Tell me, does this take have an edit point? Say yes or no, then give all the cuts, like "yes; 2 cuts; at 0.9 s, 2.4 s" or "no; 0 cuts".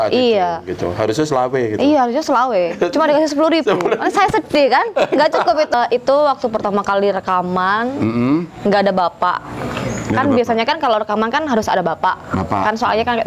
yes; 1 cut; at 5.7 s